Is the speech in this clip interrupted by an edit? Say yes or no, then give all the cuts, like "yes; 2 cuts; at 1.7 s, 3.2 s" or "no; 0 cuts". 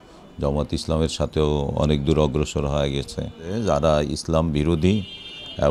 yes; 1 cut; at 3.5 s